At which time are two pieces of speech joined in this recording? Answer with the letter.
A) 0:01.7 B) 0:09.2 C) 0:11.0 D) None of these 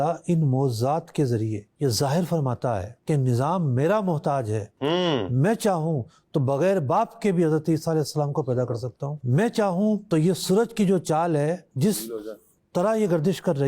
B